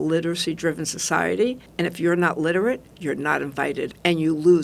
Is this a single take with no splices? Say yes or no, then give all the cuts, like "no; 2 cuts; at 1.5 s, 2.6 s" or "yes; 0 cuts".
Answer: no; 2 cuts; at 1.6 s, 3.9 s